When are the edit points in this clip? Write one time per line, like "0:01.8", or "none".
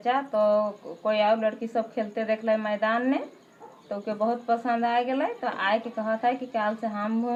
none